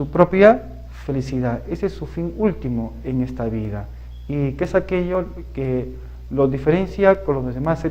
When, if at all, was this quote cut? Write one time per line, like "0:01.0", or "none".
none